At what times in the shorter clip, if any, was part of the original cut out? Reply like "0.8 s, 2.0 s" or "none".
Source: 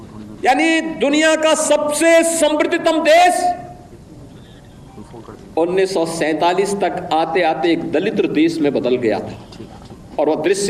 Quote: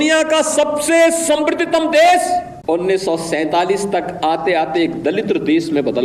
2.5 s